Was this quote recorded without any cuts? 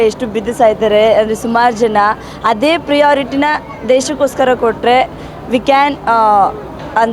yes; 0 cuts

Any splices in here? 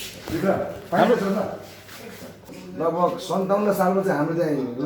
yes; 1 cut; at 2.4 s

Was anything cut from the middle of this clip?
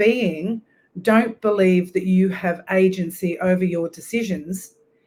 no; 0 cuts

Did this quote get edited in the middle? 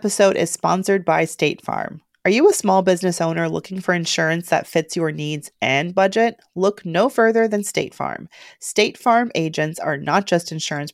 no; 0 cuts

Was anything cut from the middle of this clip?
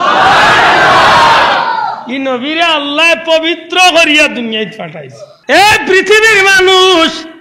yes; 1 cut; at 5.4 s

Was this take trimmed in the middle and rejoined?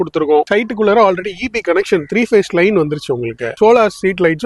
yes; 1 cut; at 3.5 s

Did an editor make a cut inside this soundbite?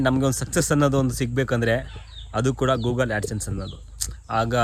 no; 0 cuts

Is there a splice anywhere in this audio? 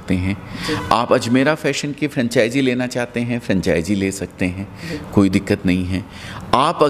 no; 0 cuts

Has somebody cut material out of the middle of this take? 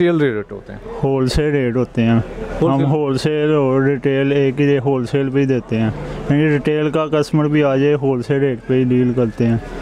no; 0 cuts

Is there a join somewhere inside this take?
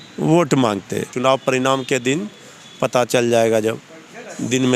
yes; 1 cut; at 1.1 s

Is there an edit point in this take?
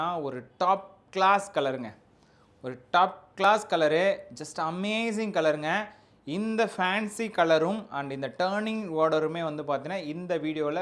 no; 0 cuts

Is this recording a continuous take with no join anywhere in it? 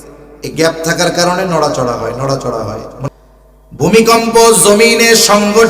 no; 1 cut; at 3.1 s

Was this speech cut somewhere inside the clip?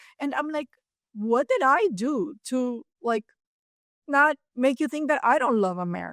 no; 0 cuts

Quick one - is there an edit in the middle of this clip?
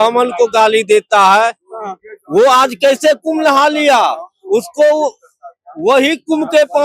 no; 0 cuts

